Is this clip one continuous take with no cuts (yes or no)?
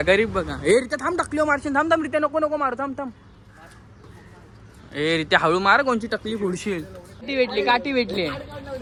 yes